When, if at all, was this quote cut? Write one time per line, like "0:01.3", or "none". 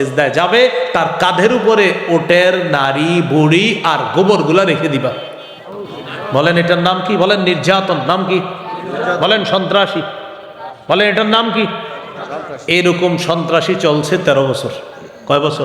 0:06.3